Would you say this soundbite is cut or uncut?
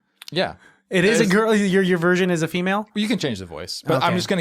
uncut